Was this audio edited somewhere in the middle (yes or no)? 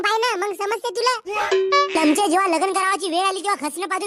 yes